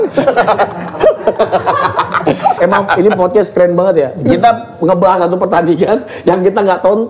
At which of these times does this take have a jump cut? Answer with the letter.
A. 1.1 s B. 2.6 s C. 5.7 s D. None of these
B